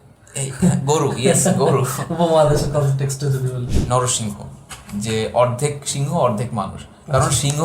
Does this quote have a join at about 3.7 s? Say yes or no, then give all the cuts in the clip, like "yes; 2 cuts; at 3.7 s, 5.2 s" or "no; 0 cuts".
yes; 1 cut; at 3.7 s